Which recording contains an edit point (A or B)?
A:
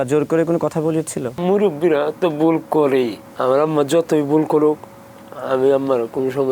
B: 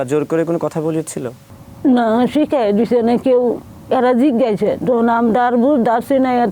A